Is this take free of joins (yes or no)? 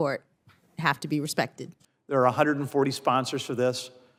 yes